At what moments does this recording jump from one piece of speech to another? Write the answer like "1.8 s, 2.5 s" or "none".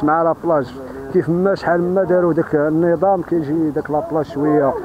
none